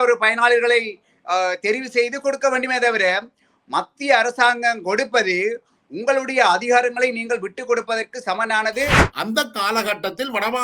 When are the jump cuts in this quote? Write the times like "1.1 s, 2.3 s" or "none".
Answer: 9.1 s

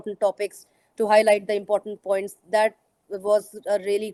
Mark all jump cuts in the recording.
none

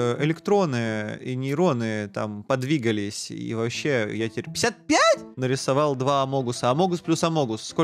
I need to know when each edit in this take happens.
5.3 s

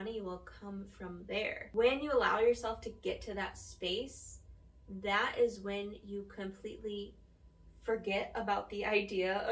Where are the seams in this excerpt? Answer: 1.6 s

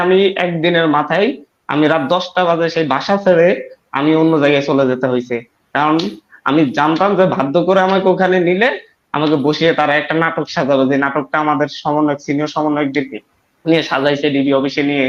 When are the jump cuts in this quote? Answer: none

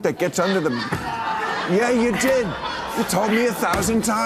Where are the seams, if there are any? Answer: none

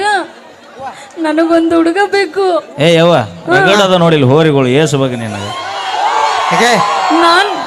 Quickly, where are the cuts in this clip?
none

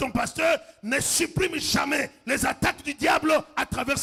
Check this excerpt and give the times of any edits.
none

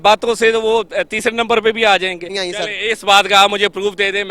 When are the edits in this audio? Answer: 2.4 s

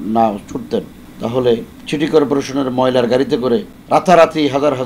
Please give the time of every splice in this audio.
1.0 s, 1.7 s, 3.7 s

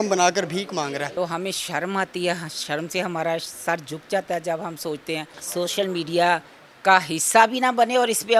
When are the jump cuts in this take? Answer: 1.0 s, 5.3 s

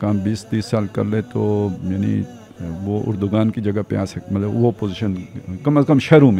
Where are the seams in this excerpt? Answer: none

